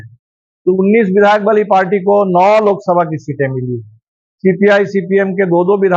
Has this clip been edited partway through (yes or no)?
no